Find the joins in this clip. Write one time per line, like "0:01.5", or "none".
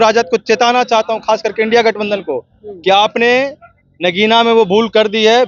none